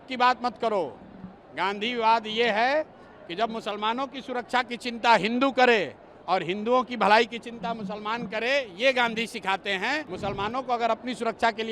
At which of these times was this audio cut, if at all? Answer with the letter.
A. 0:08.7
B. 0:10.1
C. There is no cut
B